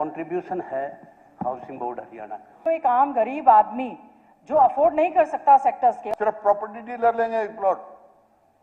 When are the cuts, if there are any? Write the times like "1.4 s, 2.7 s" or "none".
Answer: 2.6 s, 6.0 s